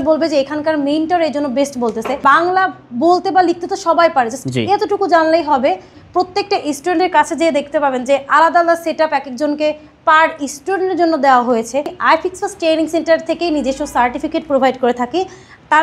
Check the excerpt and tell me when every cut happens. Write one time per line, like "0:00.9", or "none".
0:02.1
0:05.9
0:11.9